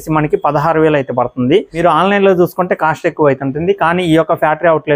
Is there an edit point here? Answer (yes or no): no